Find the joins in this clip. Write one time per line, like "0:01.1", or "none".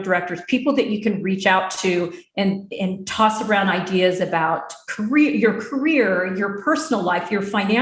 none